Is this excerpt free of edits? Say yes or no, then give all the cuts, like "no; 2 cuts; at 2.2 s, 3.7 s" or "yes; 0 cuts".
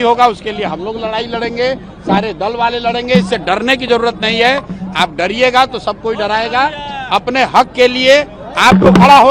yes; 0 cuts